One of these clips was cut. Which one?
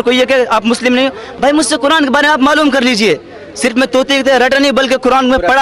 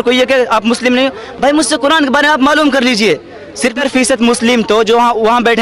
second; 1 cut; at 3.7 s

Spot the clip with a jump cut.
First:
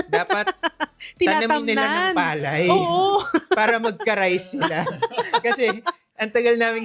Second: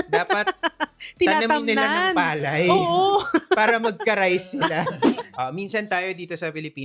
second; 1 cut; at 5.1 s

